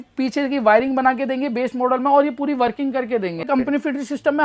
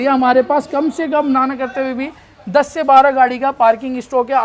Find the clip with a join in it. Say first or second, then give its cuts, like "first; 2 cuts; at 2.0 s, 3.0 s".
first; 1 cut; at 3.4 s